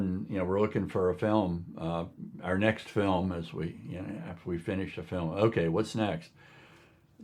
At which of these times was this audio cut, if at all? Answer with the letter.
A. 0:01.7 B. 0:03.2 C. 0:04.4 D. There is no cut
D